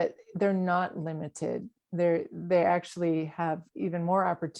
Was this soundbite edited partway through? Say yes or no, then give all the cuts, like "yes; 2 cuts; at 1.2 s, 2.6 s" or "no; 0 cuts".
no; 0 cuts